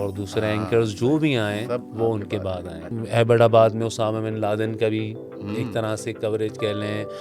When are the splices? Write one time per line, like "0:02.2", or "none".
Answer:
0:02.9